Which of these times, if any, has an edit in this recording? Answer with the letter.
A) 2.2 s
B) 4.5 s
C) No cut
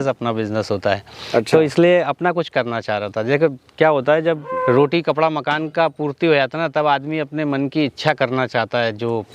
B